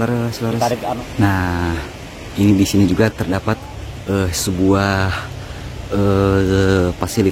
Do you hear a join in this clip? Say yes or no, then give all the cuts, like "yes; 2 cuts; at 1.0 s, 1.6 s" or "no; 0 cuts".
yes; 1 cut; at 1.0 s